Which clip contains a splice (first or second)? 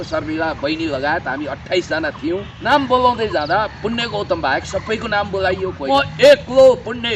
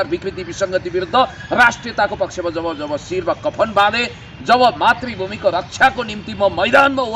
first